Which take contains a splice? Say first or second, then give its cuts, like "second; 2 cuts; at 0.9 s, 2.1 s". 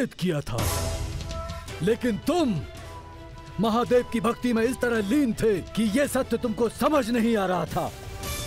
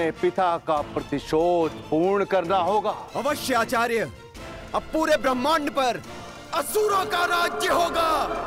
second; 1 cut; at 3.0 s